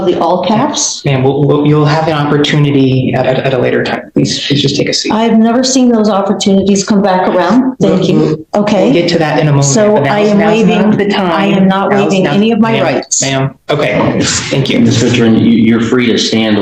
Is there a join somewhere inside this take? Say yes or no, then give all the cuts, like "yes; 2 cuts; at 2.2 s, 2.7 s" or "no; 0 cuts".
no; 0 cuts